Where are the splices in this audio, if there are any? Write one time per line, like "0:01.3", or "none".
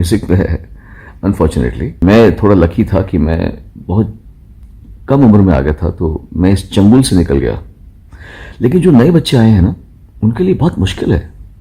0:01.9